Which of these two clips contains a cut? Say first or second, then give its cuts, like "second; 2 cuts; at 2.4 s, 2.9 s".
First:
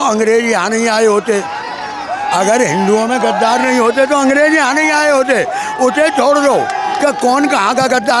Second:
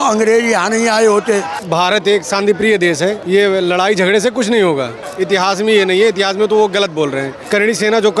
second; 4 cuts; at 1.6 s, 3.2 s, 5.0 s, 7.3 s